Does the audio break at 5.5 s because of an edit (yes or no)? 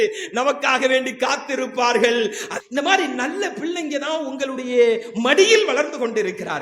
no